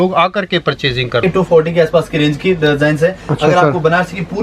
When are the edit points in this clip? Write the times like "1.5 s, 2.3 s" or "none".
1.2 s

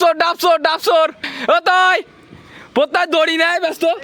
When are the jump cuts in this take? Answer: 1.3 s

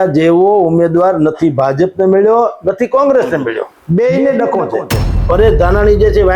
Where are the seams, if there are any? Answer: 3.7 s, 5.2 s

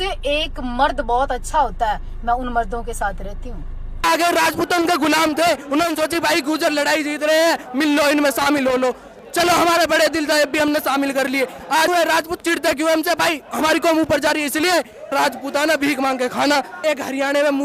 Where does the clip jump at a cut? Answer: 4.0 s, 11.9 s, 15.1 s, 16.8 s

